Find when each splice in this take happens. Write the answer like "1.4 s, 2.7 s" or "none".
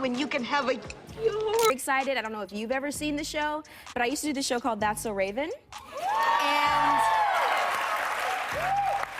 1.7 s